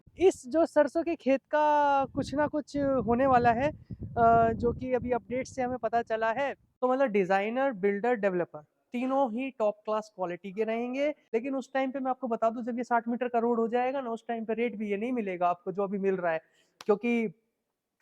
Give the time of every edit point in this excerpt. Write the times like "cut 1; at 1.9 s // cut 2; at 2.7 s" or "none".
cut 1; at 6.6 s // cut 2; at 11.3 s